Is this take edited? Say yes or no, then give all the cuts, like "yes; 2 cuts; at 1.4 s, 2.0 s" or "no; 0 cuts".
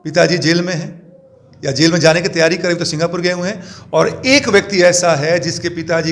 no; 0 cuts